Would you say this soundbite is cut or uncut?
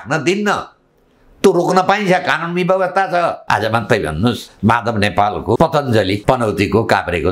cut